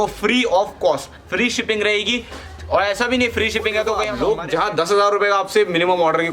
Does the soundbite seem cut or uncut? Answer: cut